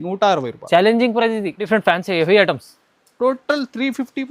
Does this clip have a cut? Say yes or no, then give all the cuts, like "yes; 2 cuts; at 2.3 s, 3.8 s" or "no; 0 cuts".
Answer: yes; 1 cut; at 1.7 s